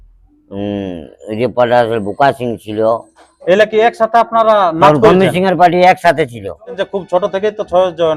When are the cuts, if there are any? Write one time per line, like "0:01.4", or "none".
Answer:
0:06.7